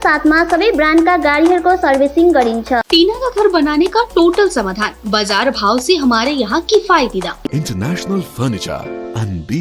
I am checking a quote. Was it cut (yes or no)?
yes